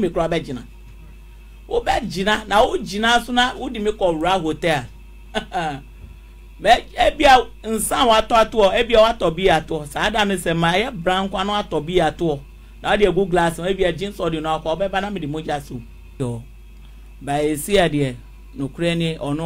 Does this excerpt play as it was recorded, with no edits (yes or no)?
no